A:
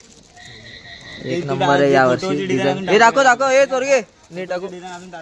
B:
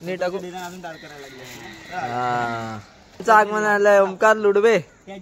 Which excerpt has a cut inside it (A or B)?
B